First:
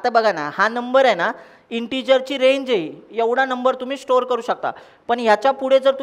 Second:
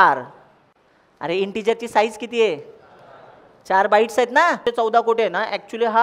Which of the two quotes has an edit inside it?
second; 1 cut; at 4.6 s

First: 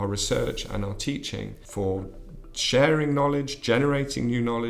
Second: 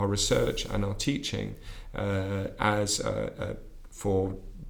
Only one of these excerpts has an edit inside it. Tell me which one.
first; 1 cut; at 1.6 s

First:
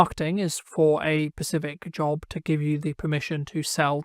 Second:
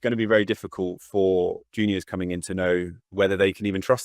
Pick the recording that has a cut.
second; 1 cut; at 3.0 s

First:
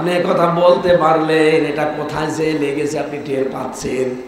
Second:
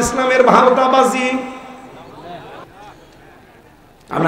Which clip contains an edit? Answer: second; 1 cut; at 2.6 s

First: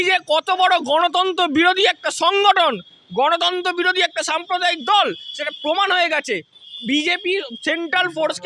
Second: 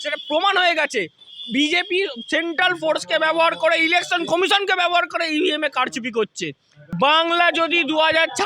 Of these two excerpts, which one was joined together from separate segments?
second; 1 cut; at 6.9 s

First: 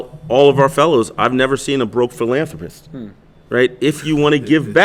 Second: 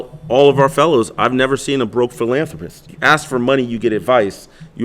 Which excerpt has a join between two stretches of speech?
second; 1 cut; at 2.9 s

